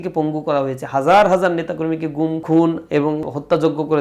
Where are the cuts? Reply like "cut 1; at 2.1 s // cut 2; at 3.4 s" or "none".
cut 1; at 2.4 s // cut 2; at 3.2 s